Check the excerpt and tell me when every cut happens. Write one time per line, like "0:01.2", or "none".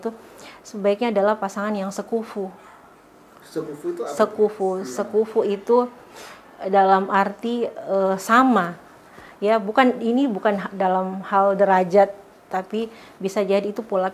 none